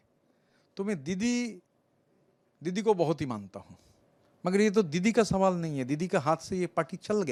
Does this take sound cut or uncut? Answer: uncut